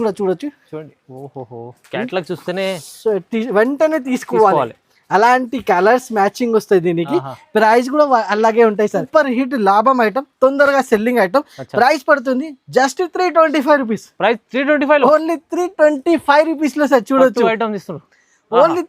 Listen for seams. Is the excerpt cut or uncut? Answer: cut